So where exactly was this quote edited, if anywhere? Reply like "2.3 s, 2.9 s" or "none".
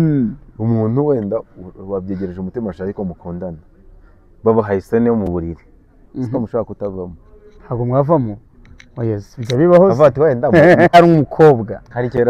10.9 s